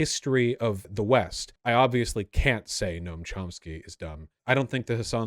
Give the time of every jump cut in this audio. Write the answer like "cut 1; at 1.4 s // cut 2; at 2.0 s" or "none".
cut 1; at 0.9 s // cut 2; at 1.5 s // cut 3; at 4.3 s